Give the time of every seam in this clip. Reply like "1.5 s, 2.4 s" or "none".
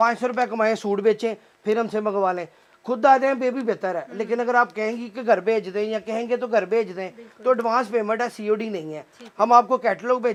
none